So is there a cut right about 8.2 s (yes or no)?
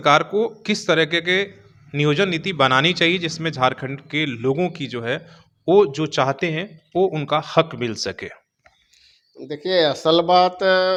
no